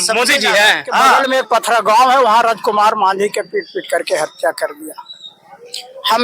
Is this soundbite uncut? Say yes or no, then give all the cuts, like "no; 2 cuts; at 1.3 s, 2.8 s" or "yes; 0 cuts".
no; 1 cut; at 1.2 s